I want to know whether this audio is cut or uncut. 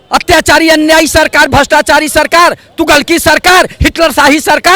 uncut